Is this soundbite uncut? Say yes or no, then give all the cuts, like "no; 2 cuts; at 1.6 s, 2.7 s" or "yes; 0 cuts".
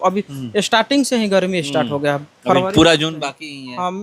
yes; 0 cuts